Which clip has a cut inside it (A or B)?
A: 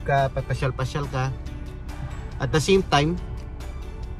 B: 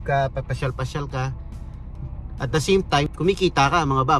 B